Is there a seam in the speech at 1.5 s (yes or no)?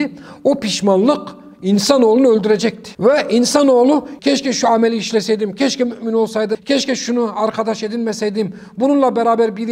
no